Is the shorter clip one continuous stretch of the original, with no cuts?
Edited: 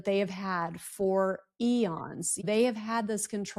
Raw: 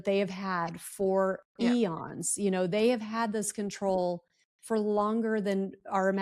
no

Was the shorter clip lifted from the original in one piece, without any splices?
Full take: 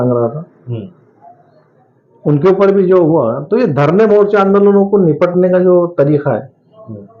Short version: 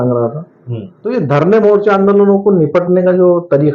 no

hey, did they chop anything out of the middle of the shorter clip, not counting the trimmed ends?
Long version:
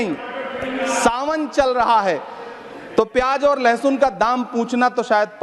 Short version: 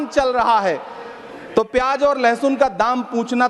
no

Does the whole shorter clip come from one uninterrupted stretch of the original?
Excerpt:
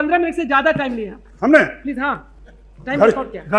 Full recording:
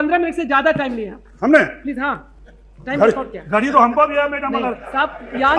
yes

